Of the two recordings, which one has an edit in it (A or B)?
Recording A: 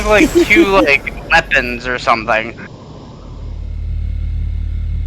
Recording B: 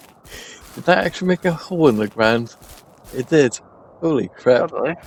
A